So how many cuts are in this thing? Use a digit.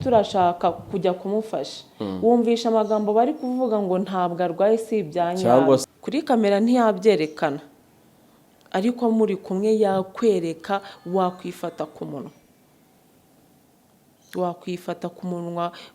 1